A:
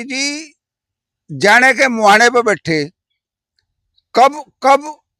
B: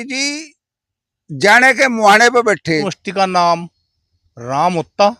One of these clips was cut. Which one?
B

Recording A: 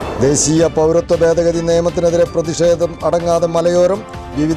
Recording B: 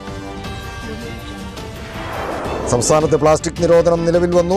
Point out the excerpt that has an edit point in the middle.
B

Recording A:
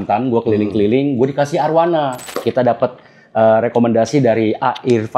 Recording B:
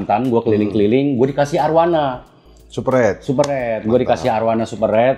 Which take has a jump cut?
A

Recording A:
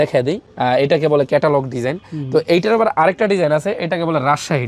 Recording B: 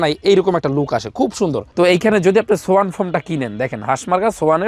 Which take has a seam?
B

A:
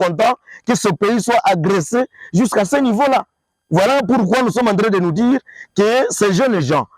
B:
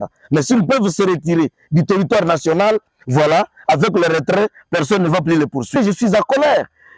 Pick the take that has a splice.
B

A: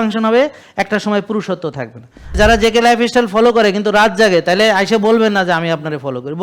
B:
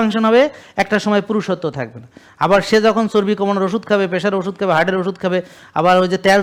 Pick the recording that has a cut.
A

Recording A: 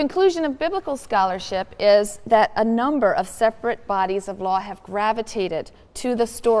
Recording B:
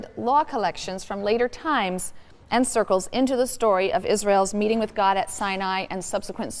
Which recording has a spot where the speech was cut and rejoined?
A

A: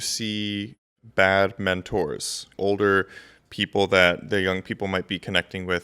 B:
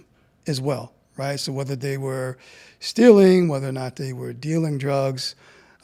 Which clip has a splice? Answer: A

